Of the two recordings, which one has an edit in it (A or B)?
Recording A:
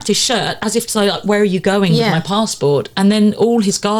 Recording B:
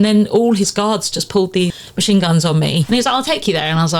B